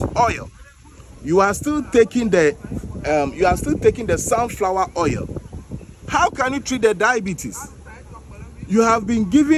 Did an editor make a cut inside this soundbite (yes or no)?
no